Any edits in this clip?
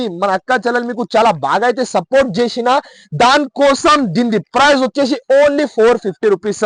no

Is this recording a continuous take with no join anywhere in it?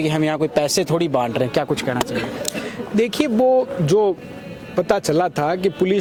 yes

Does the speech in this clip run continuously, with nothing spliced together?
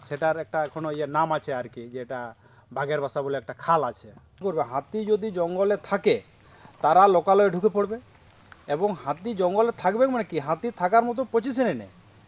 no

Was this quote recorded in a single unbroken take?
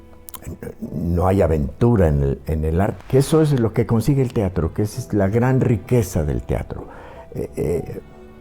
no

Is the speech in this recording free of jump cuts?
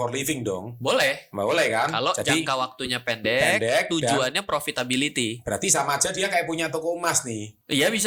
yes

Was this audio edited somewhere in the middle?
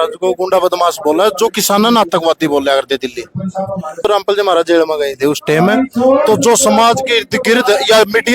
yes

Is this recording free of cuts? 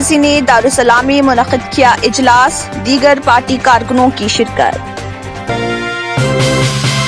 no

